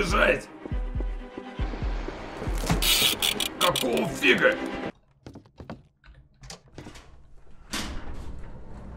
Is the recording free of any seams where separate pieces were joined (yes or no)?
no